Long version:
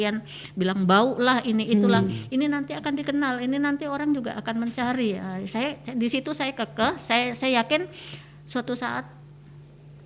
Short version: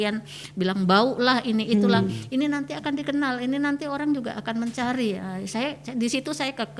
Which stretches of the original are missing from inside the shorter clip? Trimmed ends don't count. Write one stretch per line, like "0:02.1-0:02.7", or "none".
none